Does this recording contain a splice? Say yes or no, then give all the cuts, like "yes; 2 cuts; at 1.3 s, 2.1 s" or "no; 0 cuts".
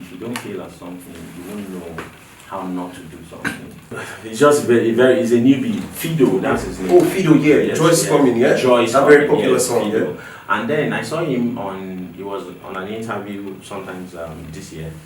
yes; 1 cut; at 3.9 s